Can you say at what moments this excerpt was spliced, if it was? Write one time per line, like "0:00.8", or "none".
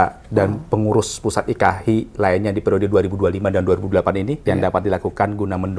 0:04.3

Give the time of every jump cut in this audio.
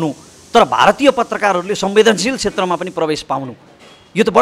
none

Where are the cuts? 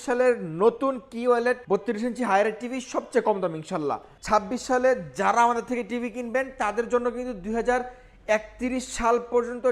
0:01.6
0:04.1

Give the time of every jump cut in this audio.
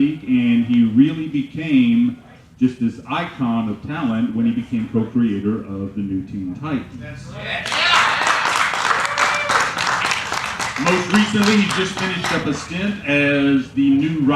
0:12.2

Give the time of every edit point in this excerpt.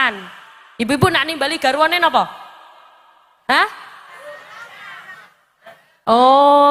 none

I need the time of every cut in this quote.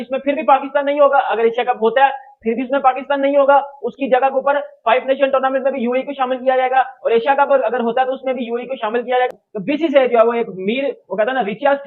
none

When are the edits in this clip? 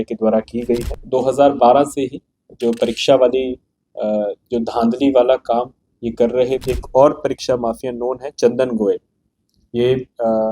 0:00.9
0:06.6

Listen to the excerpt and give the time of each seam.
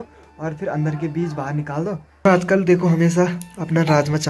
0:02.2

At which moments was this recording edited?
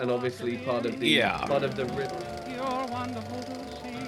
0:01.9

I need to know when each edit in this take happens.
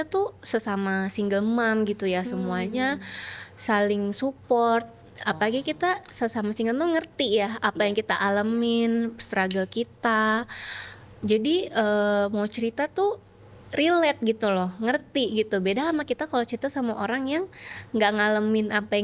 none

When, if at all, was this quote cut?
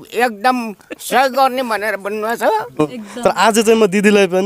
0:02.8

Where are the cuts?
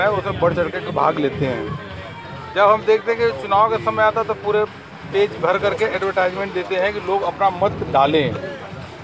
none

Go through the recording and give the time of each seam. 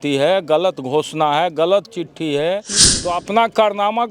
0:03.1

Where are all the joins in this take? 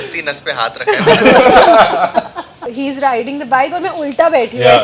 0:02.7

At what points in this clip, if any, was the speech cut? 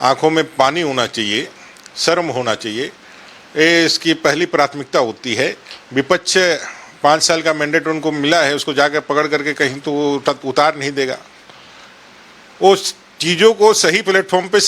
none

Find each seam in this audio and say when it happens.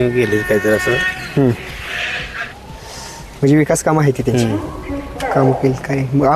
none

